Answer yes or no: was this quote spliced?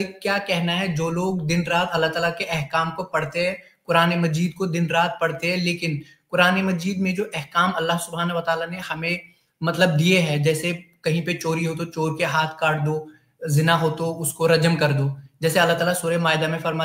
no